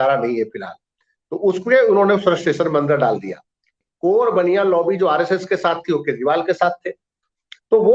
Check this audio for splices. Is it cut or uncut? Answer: cut